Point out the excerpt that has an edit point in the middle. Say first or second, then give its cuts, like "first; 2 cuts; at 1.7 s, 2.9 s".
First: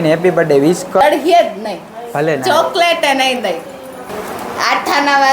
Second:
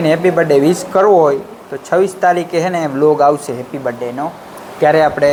first; 2 cuts; at 1.0 s, 4.1 s